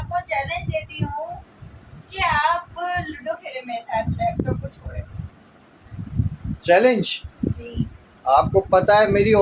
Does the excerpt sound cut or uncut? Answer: uncut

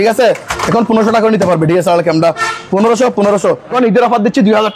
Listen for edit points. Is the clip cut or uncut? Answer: cut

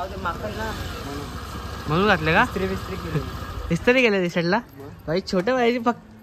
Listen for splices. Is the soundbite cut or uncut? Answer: uncut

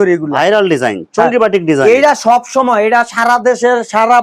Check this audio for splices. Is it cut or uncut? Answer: uncut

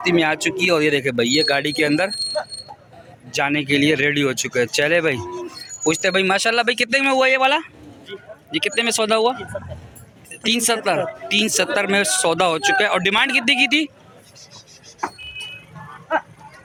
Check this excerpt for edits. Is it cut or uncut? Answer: uncut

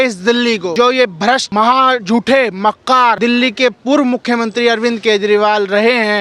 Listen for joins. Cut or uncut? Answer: cut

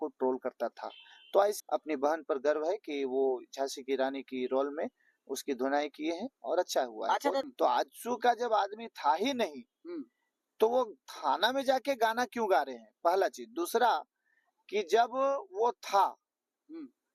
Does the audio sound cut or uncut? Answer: cut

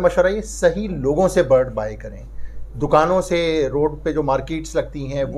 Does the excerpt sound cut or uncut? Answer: uncut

